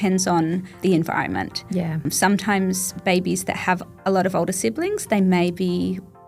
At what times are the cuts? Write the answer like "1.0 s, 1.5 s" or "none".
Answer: 0.8 s, 2.0 s